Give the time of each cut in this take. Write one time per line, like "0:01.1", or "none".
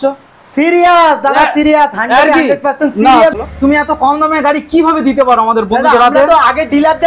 0:03.3